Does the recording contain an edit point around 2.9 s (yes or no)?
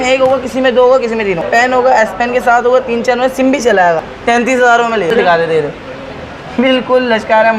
no